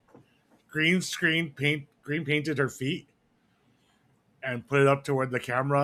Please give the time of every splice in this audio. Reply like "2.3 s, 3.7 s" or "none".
none